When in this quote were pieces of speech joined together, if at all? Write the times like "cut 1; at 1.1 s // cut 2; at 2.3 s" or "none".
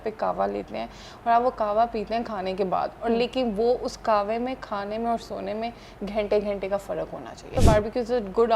cut 1; at 7.5 s